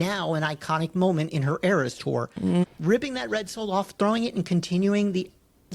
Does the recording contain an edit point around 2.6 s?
yes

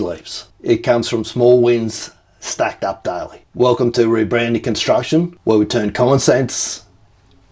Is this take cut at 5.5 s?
no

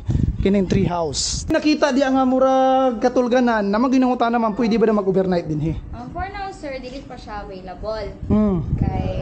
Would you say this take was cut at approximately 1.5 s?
yes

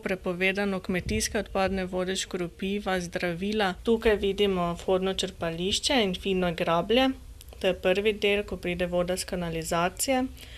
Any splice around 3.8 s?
yes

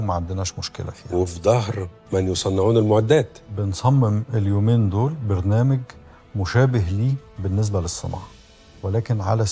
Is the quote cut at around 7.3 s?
no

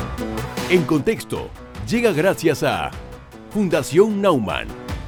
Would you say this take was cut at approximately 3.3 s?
no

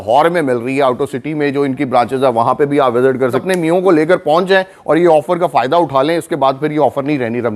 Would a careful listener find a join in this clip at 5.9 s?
no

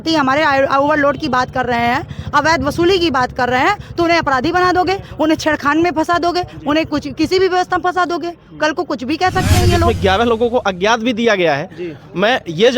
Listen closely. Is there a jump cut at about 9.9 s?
yes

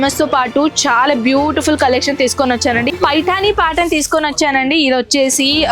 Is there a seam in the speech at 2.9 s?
yes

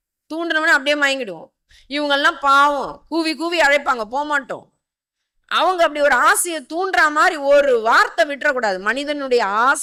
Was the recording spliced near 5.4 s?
no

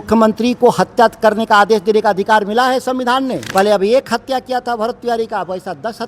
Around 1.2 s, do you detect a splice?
no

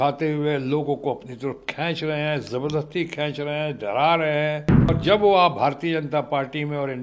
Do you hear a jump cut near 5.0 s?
yes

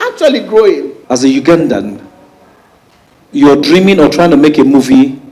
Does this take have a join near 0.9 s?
yes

